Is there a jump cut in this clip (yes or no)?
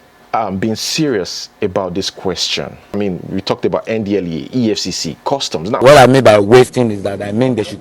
yes